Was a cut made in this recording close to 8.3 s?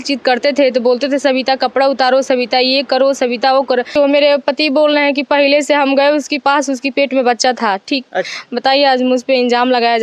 yes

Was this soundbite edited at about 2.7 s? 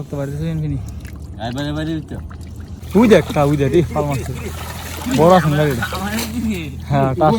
yes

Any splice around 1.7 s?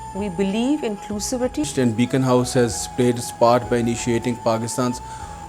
yes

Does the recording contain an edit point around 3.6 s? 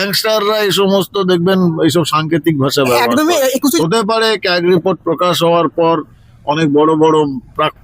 yes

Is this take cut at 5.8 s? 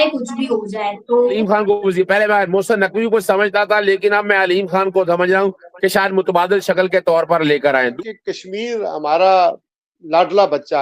no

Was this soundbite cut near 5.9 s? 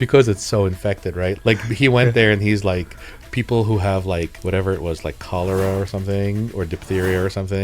no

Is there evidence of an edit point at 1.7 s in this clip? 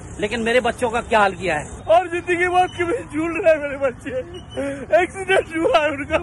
yes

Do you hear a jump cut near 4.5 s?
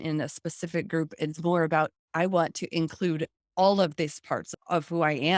yes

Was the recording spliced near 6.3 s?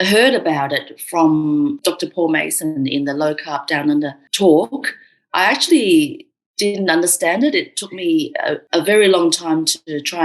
no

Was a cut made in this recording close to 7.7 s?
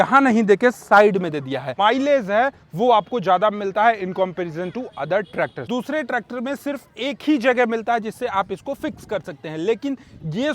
no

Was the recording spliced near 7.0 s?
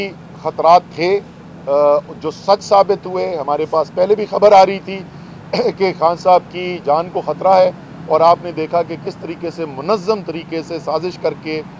no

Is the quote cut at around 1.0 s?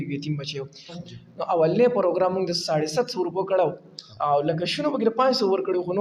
yes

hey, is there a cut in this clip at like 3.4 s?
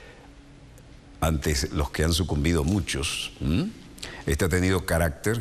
yes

